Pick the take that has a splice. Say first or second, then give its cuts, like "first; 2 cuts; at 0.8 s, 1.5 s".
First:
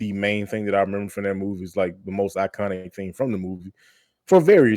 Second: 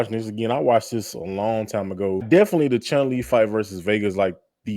second; 1 cut; at 2.2 s